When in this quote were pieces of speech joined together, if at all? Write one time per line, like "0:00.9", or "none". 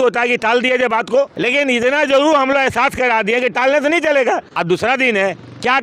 0:01.3
0:04.5